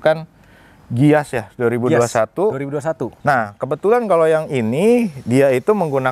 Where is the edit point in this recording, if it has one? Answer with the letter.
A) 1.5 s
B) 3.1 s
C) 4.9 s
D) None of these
B